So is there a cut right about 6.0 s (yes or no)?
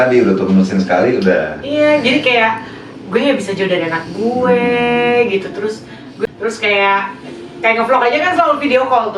yes